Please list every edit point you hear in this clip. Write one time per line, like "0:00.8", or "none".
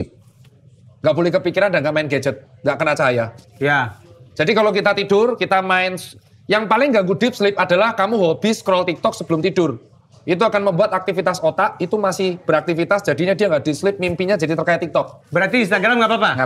none